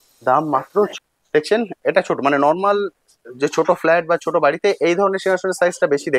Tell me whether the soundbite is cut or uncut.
cut